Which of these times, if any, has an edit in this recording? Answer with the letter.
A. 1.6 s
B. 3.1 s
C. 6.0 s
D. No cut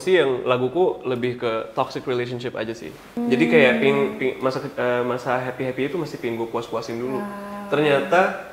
B